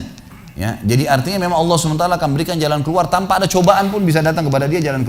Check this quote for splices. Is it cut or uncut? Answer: uncut